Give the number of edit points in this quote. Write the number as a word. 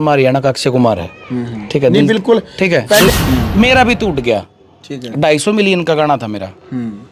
one